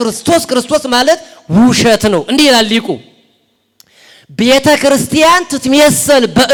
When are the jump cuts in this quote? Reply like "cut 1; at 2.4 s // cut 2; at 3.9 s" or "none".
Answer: none